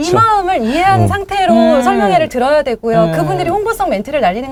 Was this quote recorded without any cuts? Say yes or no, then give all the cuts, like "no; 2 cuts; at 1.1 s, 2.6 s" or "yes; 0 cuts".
yes; 0 cuts